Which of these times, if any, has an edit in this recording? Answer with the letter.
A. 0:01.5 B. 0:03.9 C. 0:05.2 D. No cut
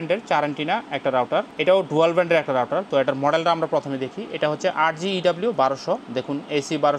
A